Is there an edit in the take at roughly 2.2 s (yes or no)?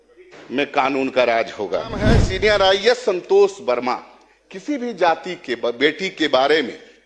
yes